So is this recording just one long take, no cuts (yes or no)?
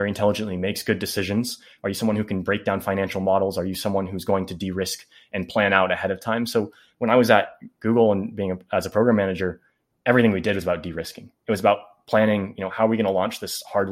yes